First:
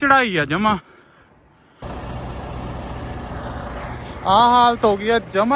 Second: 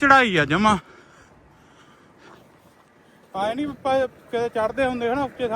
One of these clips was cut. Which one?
first; 1 cut; at 1.8 s

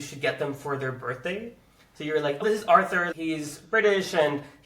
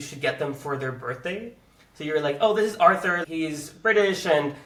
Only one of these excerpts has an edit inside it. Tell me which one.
first; 1 cut; at 2.4 s

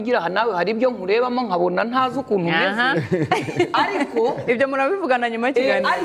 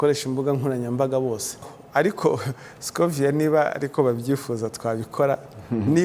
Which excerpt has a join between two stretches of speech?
second; 1 cut; at 1.8 s

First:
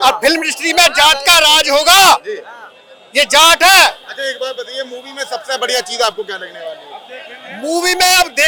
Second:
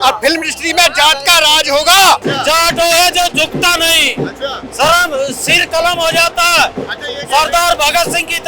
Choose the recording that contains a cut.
second; 1 cut; at 2.2 s

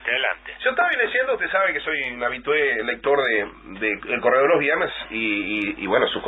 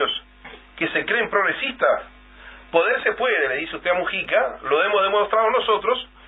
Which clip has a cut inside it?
first; 1 cut; at 1.4 s

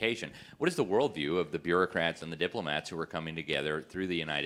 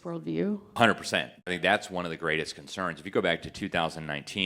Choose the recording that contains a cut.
second; 2 cuts; at 0.8 s, 1.5 s

